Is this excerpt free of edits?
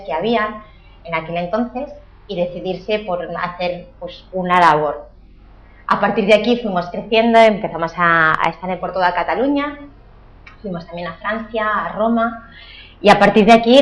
yes; 0 cuts

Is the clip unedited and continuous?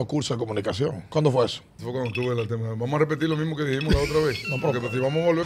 no; 2 cuts; at 1.0 s, 1.7 s

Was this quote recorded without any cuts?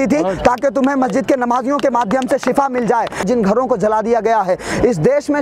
no; 1 cut; at 3.2 s

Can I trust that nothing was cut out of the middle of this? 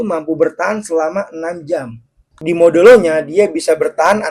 no; 1 cut; at 2.2 s

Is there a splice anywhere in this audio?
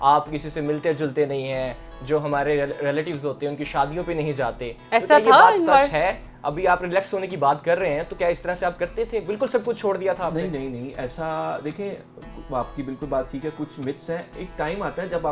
no; 0 cuts

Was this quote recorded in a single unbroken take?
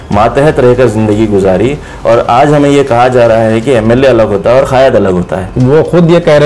no; 1 cut; at 5.5 s

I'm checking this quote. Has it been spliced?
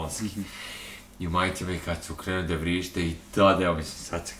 no; 0 cuts

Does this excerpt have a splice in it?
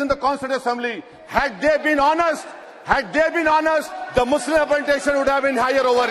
no; 0 cuts

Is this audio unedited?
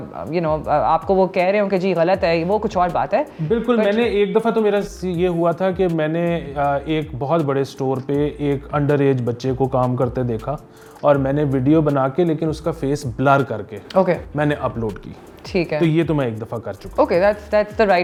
yes; 0 cuts

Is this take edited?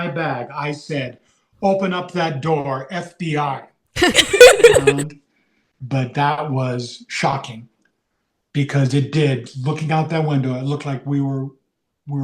yes; 1 cut; at 5.0 s

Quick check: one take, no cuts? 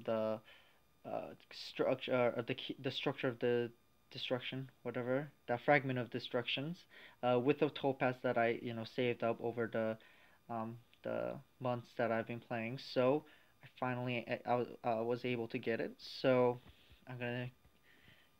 no; 1 cut; at 9.3 s

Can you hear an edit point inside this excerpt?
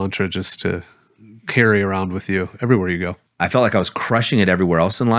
yes; 1 cut; at 3.2 s

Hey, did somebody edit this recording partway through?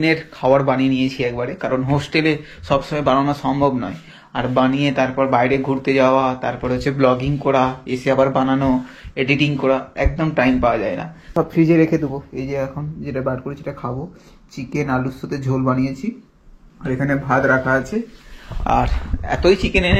yes; 1 cut; at 11.1 s

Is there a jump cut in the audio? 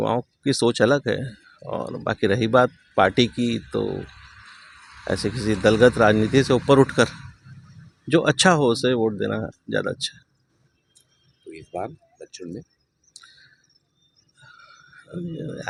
no; 0 cuts

